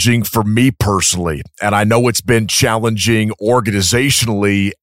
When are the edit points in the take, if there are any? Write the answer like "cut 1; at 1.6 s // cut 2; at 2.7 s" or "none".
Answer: none